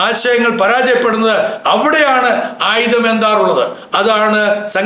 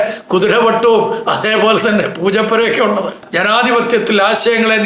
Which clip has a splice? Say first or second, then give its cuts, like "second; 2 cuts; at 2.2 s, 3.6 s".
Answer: second; 1 cut; at 3.2 s